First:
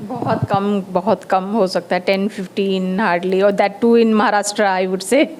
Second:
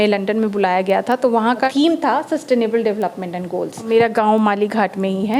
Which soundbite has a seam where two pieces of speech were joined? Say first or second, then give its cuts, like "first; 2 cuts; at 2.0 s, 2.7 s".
second; 2 cuts; at 1.7 s, 3.9 s